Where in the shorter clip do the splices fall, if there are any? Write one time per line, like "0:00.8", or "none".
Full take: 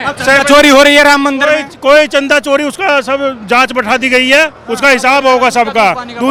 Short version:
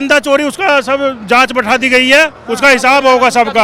none